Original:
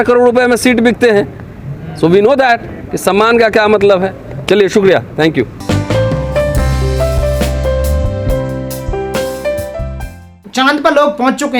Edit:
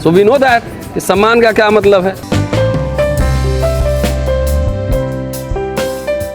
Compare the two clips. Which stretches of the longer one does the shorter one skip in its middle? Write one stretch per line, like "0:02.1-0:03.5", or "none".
0:04.3-0:05.7